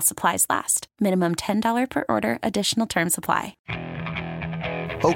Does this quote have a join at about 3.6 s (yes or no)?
yes